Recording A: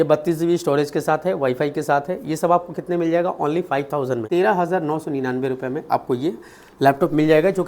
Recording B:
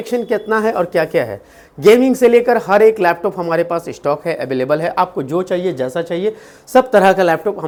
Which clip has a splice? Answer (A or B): A